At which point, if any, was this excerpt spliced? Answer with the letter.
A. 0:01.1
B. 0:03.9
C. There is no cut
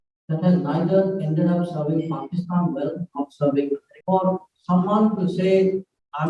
B